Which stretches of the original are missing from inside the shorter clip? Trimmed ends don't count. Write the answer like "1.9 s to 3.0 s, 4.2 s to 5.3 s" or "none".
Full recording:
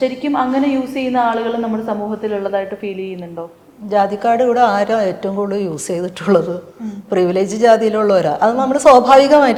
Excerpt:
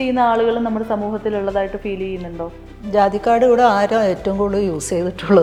none